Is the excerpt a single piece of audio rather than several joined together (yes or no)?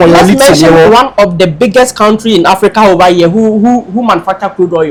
yes